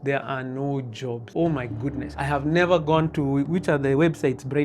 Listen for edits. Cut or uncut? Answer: cut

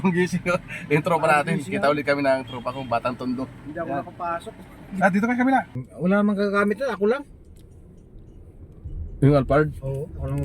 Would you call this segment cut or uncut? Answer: cut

